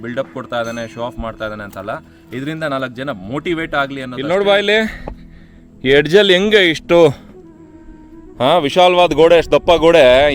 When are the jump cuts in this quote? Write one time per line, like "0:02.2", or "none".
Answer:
0:04.1